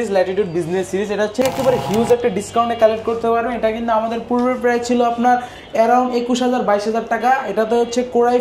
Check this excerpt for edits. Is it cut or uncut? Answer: cut